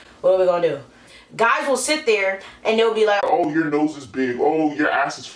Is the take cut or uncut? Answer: cut